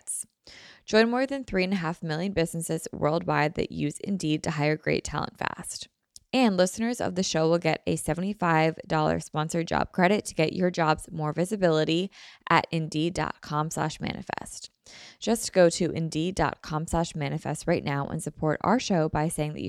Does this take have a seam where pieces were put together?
no; 0 cuts

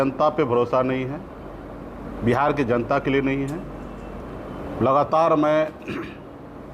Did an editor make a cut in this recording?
no; 0 cuts

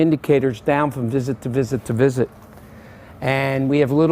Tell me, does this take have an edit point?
yes; 1 cut; at 2.0 s

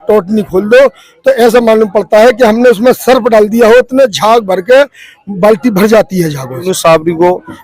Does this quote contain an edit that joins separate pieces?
yes; 1 cut; at 6.6 s

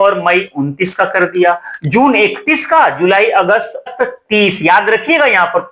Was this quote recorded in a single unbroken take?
no; 1 cut; at 3.9 s

